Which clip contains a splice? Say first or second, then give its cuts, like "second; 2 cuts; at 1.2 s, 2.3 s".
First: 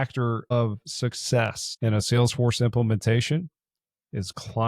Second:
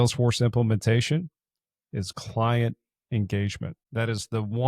second; 1 cut; at 3.8 s